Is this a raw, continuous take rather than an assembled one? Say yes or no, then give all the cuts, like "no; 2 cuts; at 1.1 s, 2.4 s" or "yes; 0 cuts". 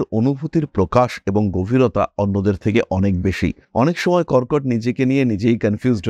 yes; 0 cuts